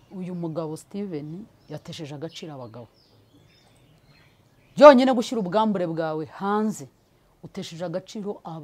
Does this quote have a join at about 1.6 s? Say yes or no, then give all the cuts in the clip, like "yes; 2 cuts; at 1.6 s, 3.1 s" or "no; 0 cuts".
no; 0 cuts